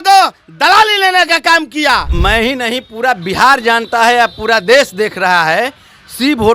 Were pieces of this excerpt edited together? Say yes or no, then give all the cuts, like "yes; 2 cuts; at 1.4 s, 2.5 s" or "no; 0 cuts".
yes; 1 cut; at 2.1 s